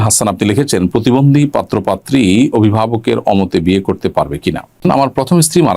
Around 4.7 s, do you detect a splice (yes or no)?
yes